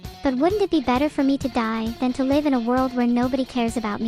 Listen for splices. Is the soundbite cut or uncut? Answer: uncut